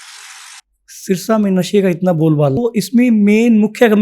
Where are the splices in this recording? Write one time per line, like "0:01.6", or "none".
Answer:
0:02.6